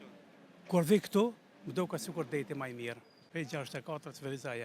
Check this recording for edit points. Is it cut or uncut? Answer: cut